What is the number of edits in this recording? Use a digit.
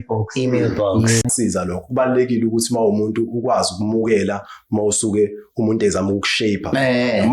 1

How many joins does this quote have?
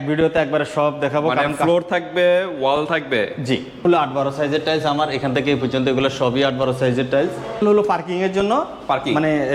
2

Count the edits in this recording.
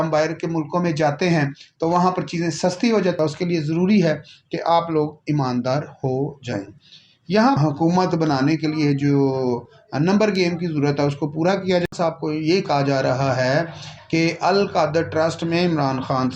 3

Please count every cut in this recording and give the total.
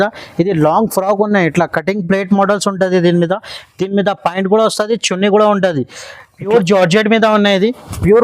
1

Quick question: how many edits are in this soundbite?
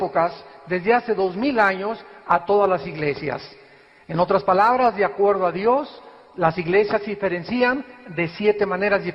1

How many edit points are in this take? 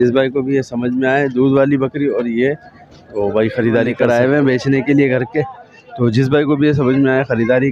1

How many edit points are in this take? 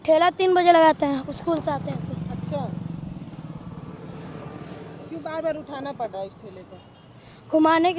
0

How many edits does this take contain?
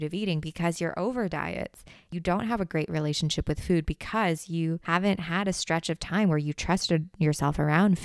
2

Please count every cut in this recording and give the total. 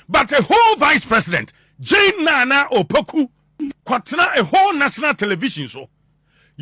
1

